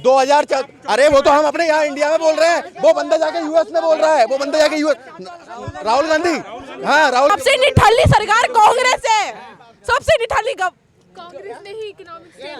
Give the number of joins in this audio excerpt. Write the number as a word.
one